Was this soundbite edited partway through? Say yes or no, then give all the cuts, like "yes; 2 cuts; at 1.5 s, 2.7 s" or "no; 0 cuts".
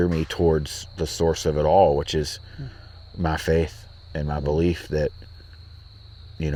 no; 0 cuts